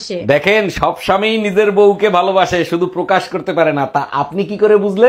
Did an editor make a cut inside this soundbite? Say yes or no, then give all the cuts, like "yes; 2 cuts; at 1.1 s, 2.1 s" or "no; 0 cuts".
no; 0 cuts